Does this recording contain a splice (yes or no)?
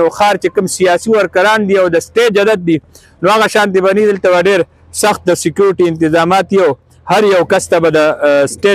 no